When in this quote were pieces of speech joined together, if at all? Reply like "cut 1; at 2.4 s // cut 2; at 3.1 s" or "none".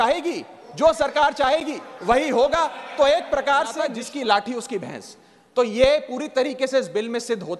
cut 1; at 4.0 s